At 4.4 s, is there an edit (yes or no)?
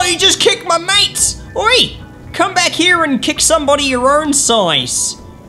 no